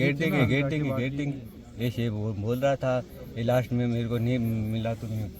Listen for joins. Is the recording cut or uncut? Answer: uncut